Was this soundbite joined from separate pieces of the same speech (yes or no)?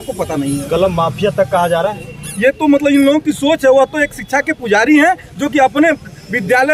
no